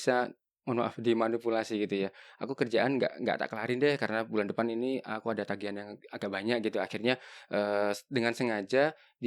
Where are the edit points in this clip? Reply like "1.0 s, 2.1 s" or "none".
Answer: none